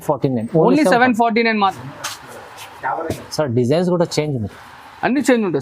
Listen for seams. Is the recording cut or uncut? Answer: cut